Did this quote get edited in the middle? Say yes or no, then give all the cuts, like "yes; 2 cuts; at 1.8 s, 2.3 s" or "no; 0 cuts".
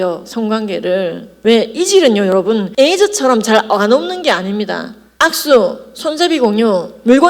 yes; 1 cut; at 5.1 s